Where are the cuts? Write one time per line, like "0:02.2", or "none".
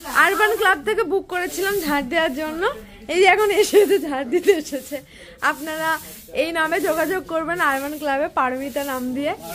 none